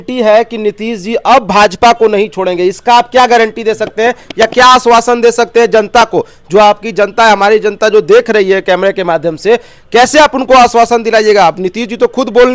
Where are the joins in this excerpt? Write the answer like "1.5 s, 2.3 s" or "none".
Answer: none